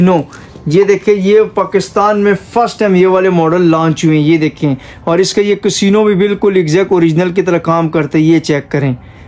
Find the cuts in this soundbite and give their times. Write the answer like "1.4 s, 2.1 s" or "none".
none